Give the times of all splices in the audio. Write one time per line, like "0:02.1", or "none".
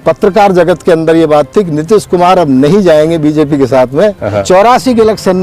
0:04.4